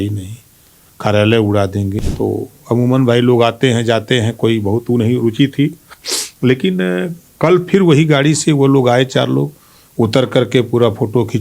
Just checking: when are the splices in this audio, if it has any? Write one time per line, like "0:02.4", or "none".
0:02.0